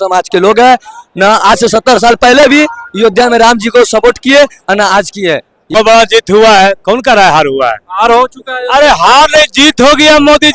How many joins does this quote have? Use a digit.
1